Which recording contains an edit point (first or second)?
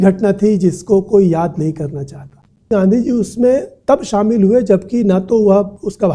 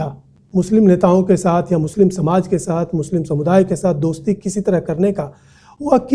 first